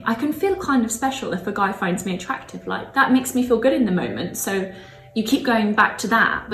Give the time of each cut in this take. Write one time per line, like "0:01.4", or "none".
none